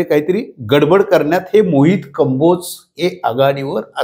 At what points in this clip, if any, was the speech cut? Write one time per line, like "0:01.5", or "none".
none